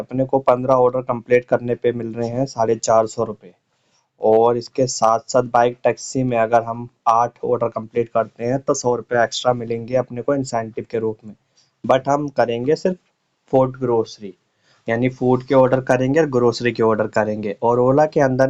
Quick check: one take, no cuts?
yes; 0 cuts

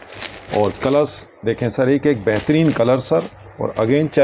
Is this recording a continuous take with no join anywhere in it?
yes; 0 cuts

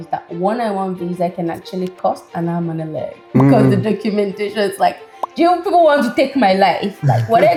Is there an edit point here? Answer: no; 0 cuts

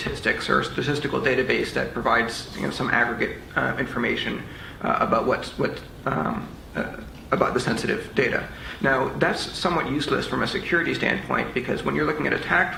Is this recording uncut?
yes; 0 cuts

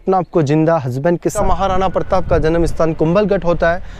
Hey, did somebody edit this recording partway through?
yes; 1 cut; at 1.3 s

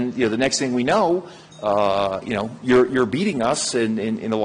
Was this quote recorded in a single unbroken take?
yes; 0 cuts

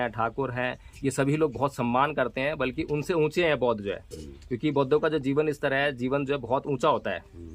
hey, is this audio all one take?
yes; 0 cuts

